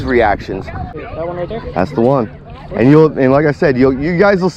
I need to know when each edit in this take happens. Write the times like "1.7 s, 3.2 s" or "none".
1.0 s